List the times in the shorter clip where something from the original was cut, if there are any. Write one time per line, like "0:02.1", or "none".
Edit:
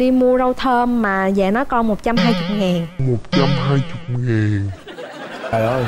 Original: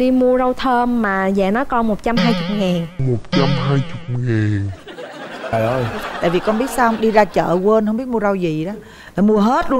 none